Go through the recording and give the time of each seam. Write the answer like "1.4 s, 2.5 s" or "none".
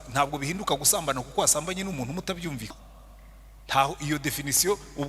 2.8 s